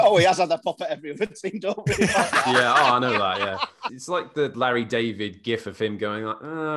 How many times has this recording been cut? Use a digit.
1